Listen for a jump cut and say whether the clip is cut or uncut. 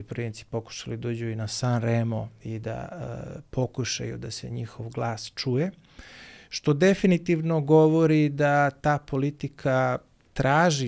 uncut